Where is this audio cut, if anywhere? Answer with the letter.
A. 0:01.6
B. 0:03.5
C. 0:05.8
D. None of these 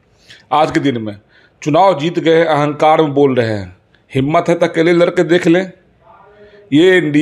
D